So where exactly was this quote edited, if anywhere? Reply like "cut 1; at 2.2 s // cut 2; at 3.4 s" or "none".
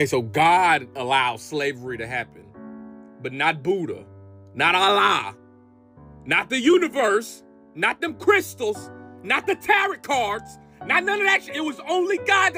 none